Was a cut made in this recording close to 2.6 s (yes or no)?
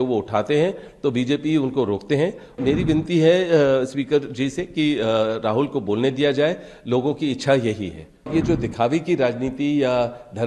yes